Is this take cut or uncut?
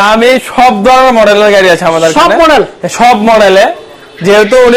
uncut